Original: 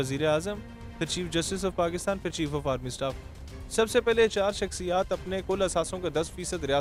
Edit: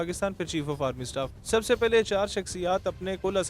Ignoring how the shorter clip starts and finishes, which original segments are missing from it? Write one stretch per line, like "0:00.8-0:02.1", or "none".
0:03.2-0:03.6